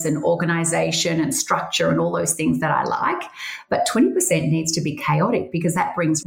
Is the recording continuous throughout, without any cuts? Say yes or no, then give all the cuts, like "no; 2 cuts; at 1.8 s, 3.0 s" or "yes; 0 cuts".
yes; 0 cuts